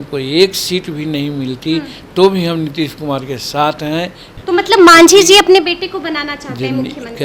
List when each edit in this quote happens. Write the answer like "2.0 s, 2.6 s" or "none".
4.2 s

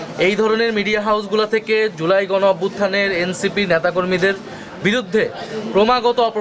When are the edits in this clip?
none

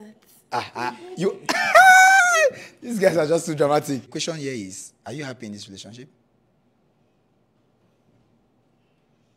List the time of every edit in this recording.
4.1 s

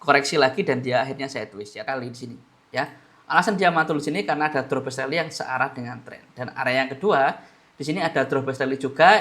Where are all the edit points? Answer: 1.7 s

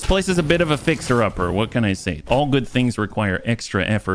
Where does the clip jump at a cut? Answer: 2.1 s

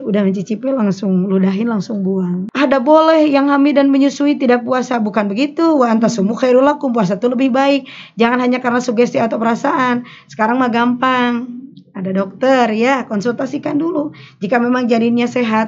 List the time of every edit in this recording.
2.4 s

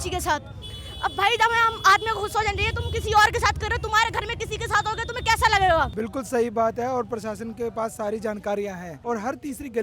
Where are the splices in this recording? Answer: 6.0 s, 8.9 s

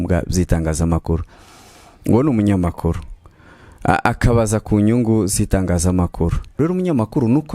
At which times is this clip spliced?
6.5 s

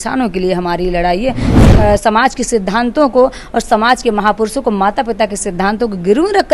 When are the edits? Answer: 1.7 s

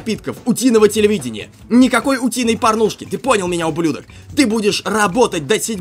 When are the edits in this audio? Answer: none

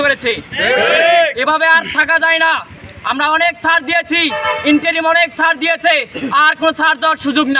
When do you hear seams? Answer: none

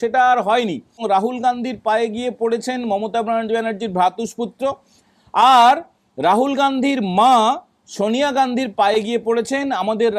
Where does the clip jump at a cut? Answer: 1.0 s

